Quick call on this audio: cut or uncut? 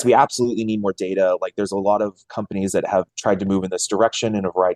cut